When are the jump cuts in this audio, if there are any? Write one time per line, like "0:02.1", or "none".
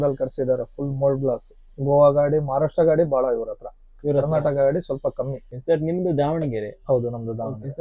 0:05.5